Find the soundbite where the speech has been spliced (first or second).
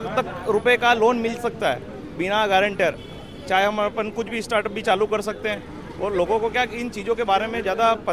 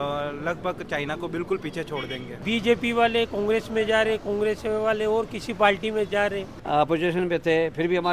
second